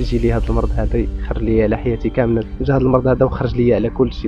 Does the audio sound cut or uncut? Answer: cut